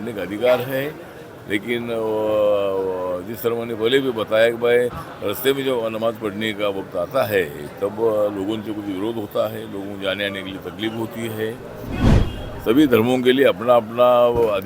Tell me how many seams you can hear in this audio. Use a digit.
1